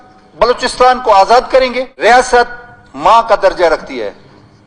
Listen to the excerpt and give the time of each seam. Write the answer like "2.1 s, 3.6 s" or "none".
2.1 s